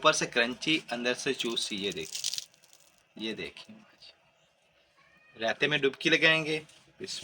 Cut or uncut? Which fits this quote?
uncut